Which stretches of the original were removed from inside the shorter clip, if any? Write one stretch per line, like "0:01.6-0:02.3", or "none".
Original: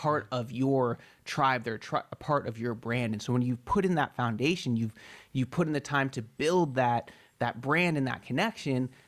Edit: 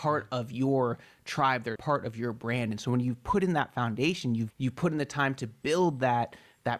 0:01.8-0:02.2
0:04.9-0:05.3